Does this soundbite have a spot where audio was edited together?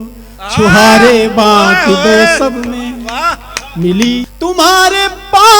yes; 1 cut; at 4.3 s

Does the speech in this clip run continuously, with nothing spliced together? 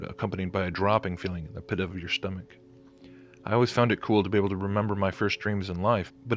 yes; 0 cuts

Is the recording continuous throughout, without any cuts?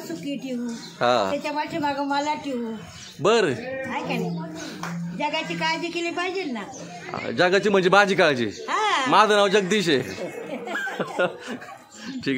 yes; 0 cuts

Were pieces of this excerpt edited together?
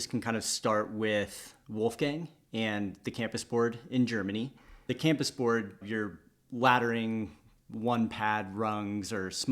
yes; 2 cuts; at 4.9 s, 5.8 s

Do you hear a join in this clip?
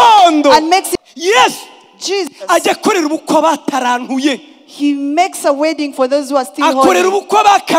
yes; 1 cut; at 0.9 s

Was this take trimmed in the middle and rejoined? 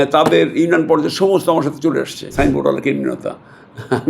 yes; 1 cut; at 2.3 s

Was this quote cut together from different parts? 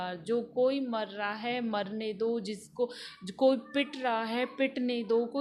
no; 0 cuts

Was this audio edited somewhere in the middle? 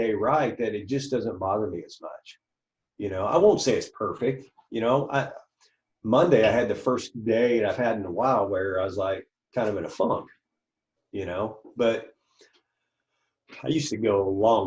no; 0 cuts

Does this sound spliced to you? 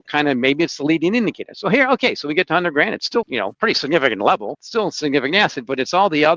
yes; 2 cuts; at 3.4 s, 4.6 s

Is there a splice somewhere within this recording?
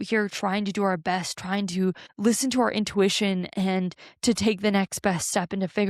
yes; 1 cut; at 2.1 s

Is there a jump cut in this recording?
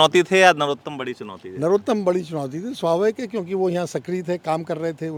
no; 0 cuts

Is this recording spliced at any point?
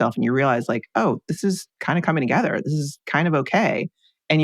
yes; 1 cut; at 1.7 s

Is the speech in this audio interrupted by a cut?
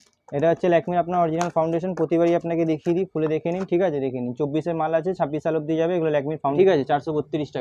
yes; 1 cut; at 6.5 s

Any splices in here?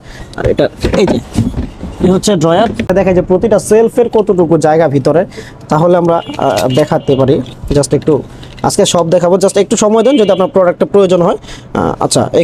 yes; 1 cut; at 2.9 s

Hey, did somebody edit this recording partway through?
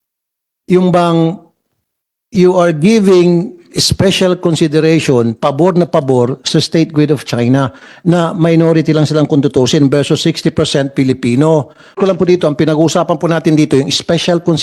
yes; 1 cut; at 12.0 s

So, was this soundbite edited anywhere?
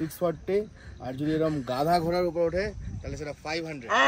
no; 0 cuts

